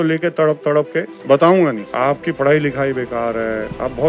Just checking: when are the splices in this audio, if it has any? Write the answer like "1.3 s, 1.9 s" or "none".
1.1 s, 1.8 s